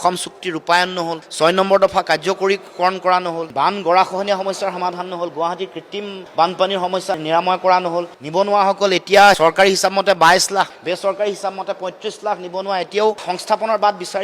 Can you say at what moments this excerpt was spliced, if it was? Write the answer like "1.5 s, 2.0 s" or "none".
13.2 s